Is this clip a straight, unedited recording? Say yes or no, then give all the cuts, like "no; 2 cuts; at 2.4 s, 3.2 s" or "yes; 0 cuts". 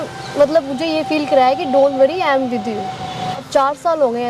no; 1 cut; at 3.4 s